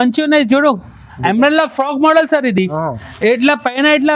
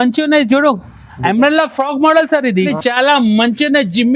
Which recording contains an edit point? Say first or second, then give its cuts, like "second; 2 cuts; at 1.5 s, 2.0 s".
second; 1 cut; at 2.6 s